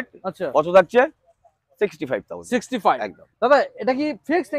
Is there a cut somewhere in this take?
no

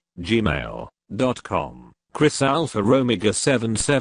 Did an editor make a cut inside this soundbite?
yes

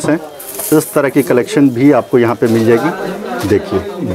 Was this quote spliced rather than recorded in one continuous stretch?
no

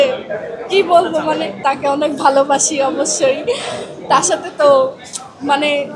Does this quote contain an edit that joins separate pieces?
yes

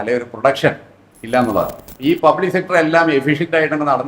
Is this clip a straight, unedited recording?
no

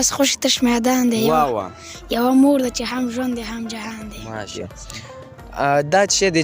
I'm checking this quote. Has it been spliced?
yes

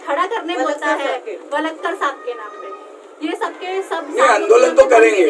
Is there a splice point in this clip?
yes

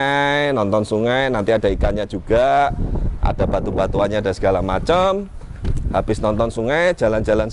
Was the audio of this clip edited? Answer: no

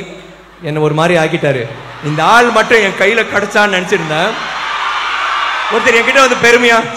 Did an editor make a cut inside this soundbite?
no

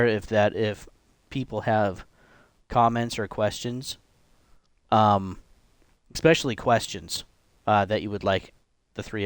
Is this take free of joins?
yes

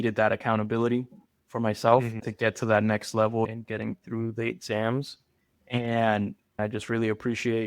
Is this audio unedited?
no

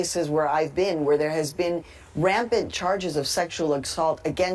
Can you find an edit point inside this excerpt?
no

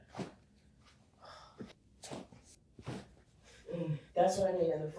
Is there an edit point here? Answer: yes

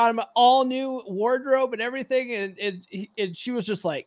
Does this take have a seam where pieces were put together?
no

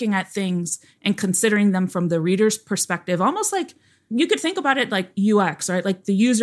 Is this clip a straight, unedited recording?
yes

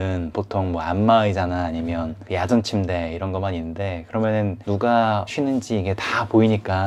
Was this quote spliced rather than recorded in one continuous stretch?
no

